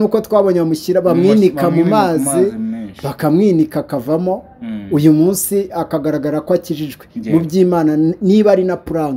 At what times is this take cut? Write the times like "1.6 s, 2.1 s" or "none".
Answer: none